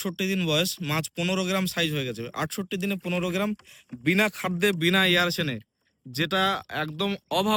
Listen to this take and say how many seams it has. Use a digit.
0